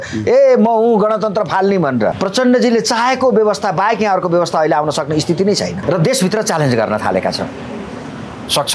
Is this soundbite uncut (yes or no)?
no